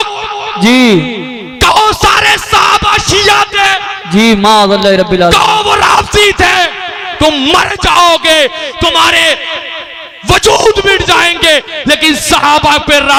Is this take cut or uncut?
uncut